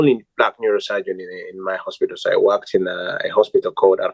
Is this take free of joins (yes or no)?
yes